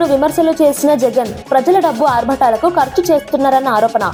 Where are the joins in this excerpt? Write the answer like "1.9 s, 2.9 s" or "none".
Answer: none